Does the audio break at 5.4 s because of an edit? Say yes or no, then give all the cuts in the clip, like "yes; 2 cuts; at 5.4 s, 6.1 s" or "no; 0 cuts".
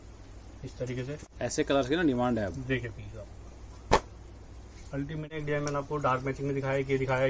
yes; 2 cuts; at 1.2 s, 5.4 s